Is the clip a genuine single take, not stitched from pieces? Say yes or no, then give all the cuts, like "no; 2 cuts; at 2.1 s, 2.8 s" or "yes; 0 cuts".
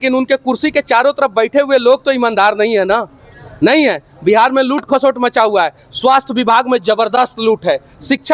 yes; 0 cuts